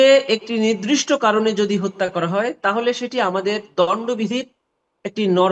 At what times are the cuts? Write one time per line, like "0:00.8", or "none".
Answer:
none